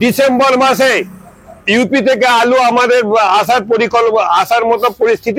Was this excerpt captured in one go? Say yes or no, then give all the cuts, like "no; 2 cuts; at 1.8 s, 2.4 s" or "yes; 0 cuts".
yes; 0 cuts